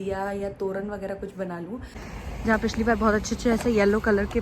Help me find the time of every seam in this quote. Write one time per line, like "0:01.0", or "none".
0:02.0